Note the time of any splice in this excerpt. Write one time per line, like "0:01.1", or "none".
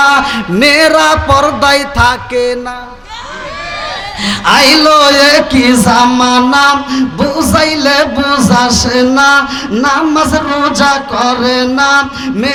none